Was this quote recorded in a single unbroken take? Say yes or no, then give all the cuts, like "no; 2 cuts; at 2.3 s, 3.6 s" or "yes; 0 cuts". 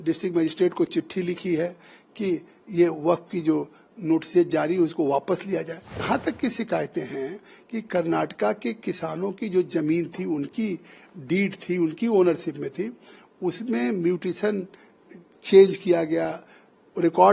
no; 1 cut; at 6.0 s